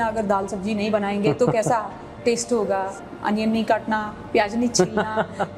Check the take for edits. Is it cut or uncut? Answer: cut